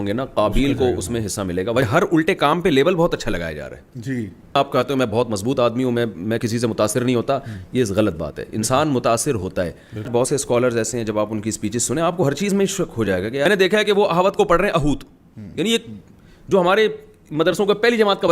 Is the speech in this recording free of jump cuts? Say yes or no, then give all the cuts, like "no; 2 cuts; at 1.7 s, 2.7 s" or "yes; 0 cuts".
no; 4 cuts; at 1.8 s, 4.6 s, 10.1 s, 13.5 s